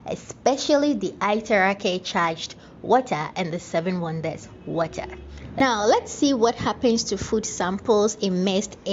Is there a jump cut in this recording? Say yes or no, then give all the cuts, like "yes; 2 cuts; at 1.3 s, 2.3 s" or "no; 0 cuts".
yes; 1 cut; at 5.6 s